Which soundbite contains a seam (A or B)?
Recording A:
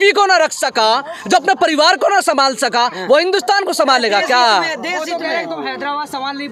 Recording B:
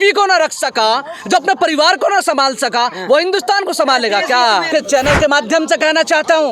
B